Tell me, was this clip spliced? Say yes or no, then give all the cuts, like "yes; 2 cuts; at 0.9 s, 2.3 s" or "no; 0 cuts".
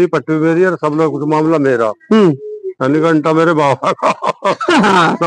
no; 0 cuts